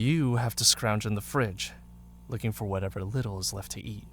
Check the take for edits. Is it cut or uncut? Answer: uncut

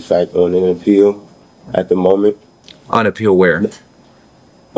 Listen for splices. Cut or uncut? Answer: uncut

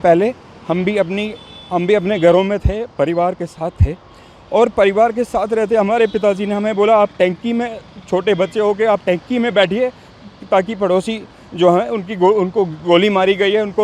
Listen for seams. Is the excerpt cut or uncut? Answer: uncut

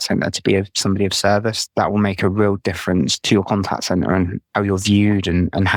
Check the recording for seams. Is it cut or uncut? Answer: uncut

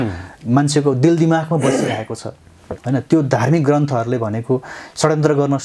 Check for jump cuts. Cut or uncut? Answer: uncut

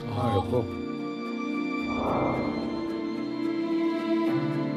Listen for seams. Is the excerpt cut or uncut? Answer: uncut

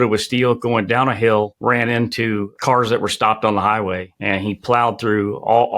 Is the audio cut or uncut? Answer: cut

